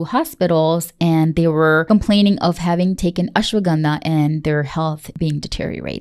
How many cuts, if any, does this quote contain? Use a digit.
2